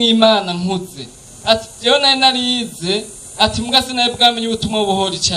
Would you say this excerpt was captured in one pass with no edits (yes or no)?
yes